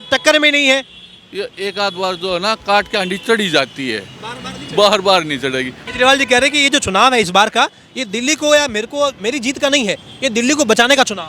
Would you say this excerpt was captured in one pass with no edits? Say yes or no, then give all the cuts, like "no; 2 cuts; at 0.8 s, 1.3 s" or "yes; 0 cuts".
no; 1 cut; at 5.7 s